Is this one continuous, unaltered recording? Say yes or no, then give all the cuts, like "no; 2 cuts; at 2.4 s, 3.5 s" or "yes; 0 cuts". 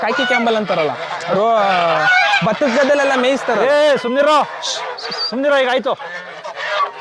yes; 0 cuts